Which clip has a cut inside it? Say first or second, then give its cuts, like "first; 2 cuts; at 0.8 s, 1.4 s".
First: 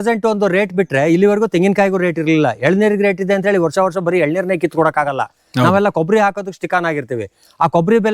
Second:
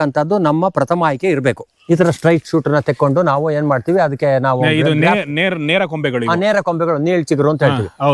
second; 1 cut; at 1.7 s